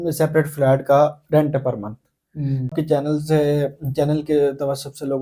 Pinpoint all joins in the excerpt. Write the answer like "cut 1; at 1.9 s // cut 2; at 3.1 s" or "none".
cut 1; at 2.7 s